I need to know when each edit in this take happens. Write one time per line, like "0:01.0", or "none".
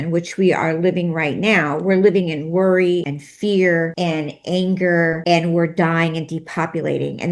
0:03.2
0:03.9
0:05.2